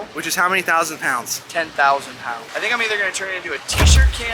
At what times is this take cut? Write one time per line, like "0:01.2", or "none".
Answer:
0:02.5